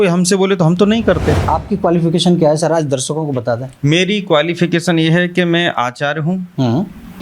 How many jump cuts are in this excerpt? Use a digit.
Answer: 1